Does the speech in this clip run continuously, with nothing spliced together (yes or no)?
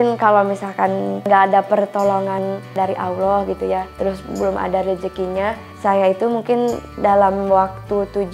no